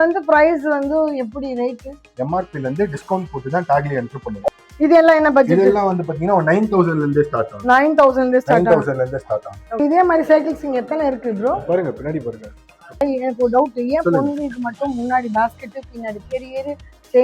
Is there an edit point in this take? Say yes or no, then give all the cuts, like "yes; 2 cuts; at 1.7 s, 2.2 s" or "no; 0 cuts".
yes; 3 cuts; at 4.5 s, 9.8 s, 13.0 s